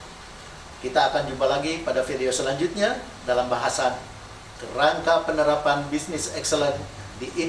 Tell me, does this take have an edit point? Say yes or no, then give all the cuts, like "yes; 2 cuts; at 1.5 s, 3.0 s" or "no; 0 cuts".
no; 0 cuts